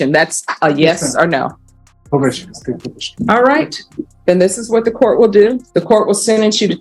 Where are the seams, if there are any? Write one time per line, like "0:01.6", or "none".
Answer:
0:05.6